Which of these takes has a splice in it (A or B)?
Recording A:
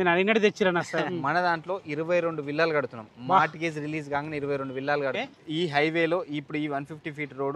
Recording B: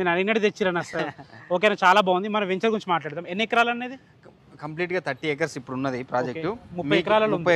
A